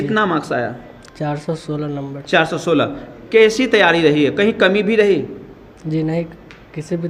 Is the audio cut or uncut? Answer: uncut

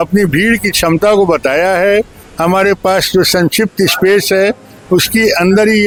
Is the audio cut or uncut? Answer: uncut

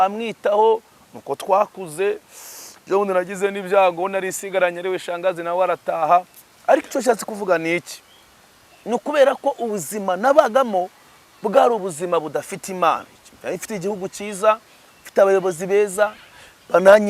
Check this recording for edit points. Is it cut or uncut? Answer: uncut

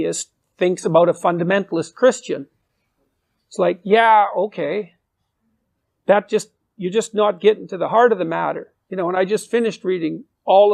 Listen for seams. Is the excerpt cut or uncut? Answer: uncut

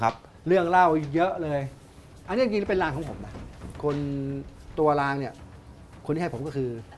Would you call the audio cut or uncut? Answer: uncut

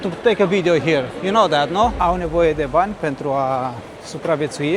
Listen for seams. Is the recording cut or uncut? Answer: cut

